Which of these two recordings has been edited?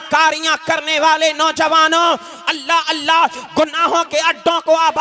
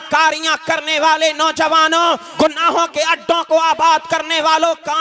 second; 1 cut; at 2.3 s

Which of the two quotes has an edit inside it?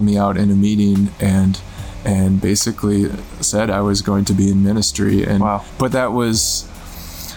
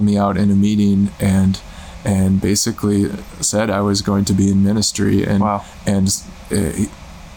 first; 1 cut; at 5.7 s

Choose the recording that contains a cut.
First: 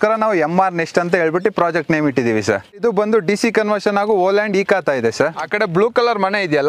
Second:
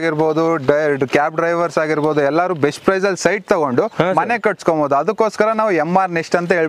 first; 2 cuts; at 2.8 s, 5.4 s

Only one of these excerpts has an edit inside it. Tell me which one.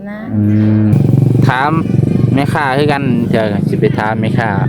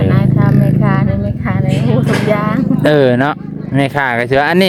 first; 1 cut; at 0.9 s

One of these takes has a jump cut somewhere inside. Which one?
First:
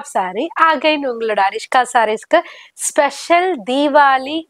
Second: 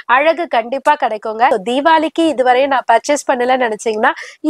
second; 1 cut; at 1.5 s

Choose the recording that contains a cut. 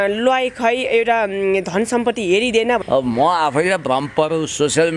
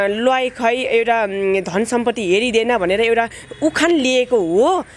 first; 1 cut; at 2.8 s

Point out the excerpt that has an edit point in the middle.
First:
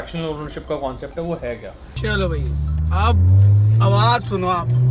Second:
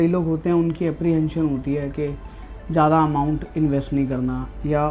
first; 1 cut; at 1.9 s

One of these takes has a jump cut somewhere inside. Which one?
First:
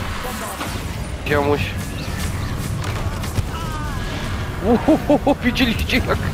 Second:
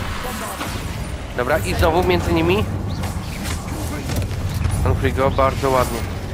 first; 1 cut; at 1.2 s

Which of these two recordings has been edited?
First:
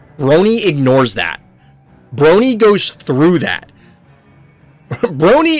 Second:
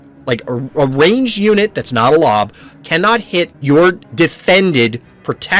second; 2 cuts; at 3.6 s, 4.0 s

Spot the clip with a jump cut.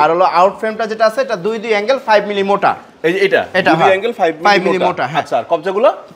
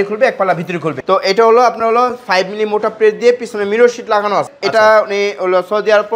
second; 2 cuts; at 0.9 s, 4.5 s

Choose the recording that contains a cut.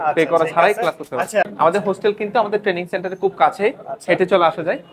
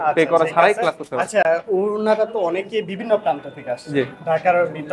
first; 1 cut; at 1.5 s

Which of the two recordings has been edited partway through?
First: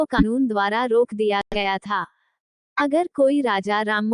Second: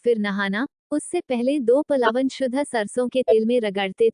second; 1 cut; at 2.1 s

